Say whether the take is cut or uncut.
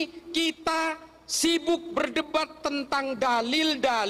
uncut